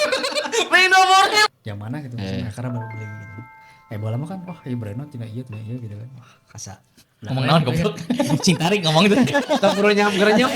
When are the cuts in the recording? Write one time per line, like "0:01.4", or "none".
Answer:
0:01.5